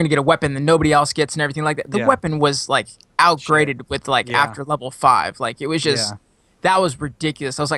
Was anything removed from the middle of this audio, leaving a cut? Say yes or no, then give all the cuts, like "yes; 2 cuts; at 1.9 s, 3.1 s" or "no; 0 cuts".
no; 0 cuts